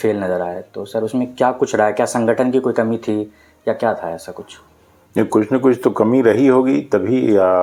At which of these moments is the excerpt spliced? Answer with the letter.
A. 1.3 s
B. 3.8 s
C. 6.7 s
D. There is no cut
D